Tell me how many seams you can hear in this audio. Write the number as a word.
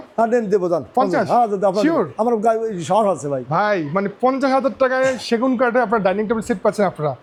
zero